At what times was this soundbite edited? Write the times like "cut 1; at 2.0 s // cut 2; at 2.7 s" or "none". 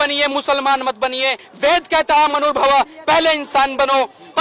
cut 1; at 1.4 s